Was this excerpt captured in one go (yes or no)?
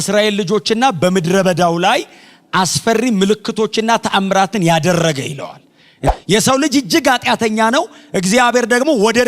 no